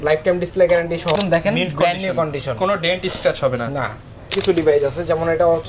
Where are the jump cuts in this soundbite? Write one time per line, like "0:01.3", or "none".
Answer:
0:01.2
0:04.4